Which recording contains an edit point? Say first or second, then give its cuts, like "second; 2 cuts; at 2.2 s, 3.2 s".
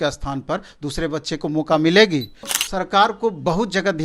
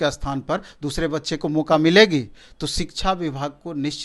first; 1 cut; at 2.6 s